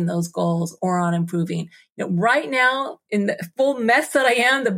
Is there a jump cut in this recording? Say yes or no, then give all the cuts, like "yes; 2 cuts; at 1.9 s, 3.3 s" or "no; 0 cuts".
yes; 1 cut; at 3.0 s